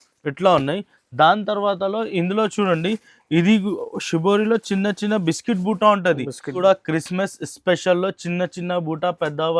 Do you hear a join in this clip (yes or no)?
yes